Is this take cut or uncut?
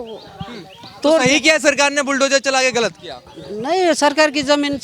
uncut